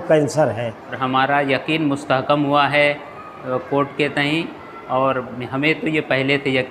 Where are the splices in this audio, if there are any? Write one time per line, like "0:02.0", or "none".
0:01.0